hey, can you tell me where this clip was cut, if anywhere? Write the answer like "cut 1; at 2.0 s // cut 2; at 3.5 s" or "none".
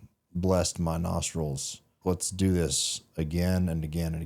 cut 1; at 1.9 s